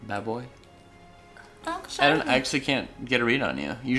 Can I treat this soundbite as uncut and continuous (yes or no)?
no